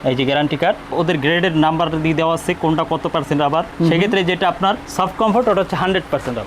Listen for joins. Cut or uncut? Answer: cut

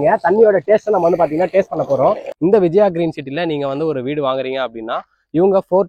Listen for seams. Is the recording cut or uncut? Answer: cut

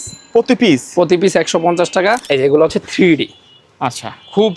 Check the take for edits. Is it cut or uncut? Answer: cut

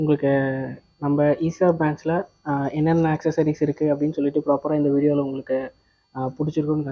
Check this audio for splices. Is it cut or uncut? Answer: uncut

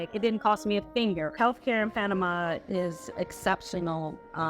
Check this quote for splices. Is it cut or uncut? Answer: cut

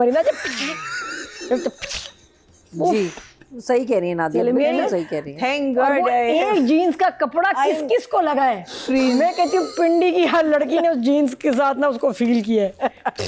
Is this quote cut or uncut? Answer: uncut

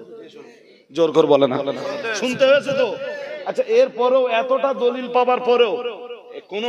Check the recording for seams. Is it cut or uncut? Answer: uncut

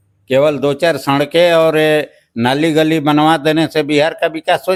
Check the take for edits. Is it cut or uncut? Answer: uncut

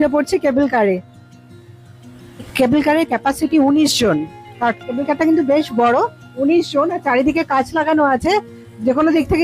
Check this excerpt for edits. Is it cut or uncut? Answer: uncut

